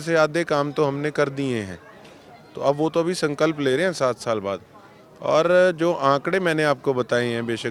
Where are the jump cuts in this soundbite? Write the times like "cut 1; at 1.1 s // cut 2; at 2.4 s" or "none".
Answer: none